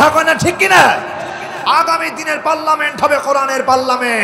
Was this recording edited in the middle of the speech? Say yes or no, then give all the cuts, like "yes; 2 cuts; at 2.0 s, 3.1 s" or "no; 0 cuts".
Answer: yes; 1 cut; at 1.5 s